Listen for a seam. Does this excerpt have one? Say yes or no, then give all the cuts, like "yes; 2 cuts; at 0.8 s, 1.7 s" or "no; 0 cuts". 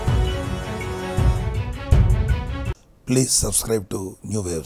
no; 0 cuts